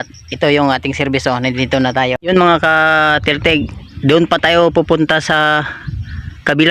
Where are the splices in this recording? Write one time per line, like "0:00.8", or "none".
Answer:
0:02.2